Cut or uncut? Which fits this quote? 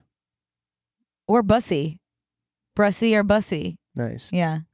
cut